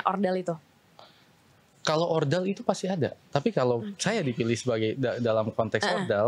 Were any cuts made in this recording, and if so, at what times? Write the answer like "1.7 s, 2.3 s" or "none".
none

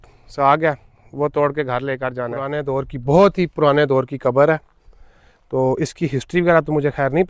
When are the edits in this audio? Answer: 2.6 s

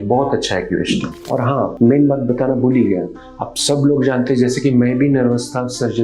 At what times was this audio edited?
1.2 s

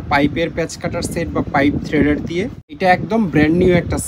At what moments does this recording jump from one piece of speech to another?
2.6 s

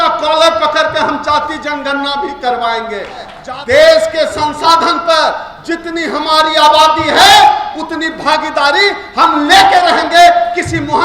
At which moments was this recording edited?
3.4 s

